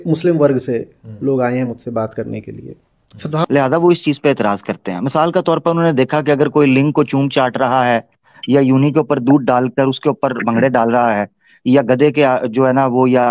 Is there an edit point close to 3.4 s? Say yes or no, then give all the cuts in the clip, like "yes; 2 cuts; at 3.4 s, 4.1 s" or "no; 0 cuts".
yes; 1 cut; at 3.4 s